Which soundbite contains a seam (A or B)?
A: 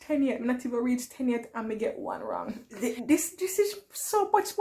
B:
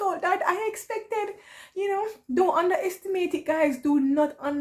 A